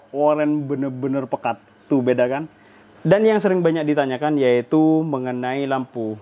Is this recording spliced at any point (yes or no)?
yes